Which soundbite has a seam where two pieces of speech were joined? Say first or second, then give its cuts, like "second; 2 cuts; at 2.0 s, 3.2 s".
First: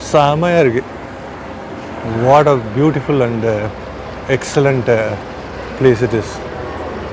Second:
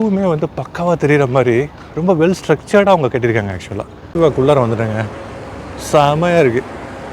second; 1 cut; at 4.0 s